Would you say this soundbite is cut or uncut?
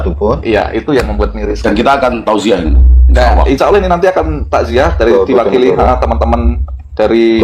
uncut